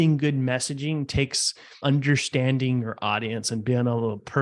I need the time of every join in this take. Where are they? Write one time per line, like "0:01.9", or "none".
0:01.8

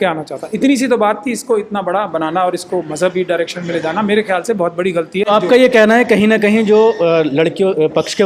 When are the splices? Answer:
none

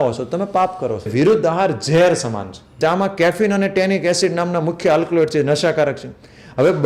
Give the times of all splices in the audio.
0:01.1
0:02.8

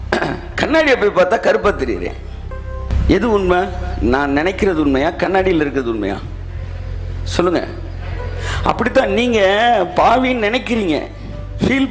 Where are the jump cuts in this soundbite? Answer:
0:02.9

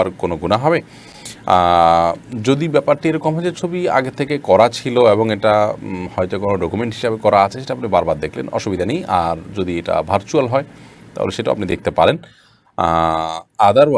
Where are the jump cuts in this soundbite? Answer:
none

